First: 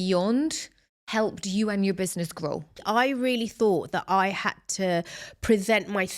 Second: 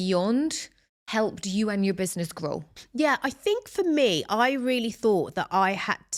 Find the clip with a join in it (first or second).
first